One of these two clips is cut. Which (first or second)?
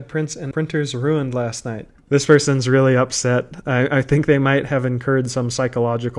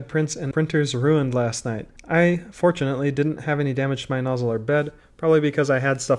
first